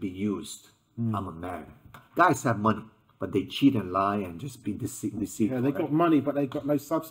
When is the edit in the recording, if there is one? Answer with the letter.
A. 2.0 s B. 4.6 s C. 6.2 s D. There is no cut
A